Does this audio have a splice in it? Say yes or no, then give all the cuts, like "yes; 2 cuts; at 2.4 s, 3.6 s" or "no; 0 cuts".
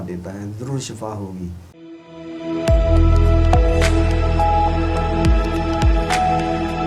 yes; 1 cut; at 1.7 s